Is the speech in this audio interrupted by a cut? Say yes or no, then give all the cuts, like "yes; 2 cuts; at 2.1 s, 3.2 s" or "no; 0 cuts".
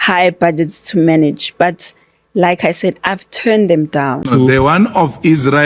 yes; 1 cut; at 4.2 s